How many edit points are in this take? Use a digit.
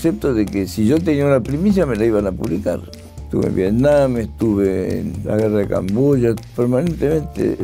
3